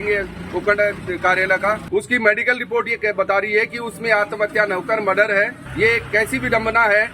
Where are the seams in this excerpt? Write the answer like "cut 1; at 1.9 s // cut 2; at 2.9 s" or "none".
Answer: cut 1; at 1.8 s // cut 2; at 5.6 s